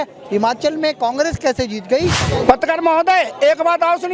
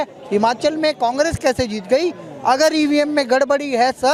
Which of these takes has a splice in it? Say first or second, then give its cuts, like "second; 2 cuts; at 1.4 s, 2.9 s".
first; 1 cut; at 2.2 s